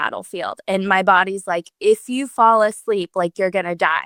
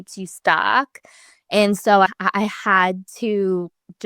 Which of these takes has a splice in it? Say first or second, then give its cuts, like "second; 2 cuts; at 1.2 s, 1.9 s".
second; 1 cut; at 2.1 s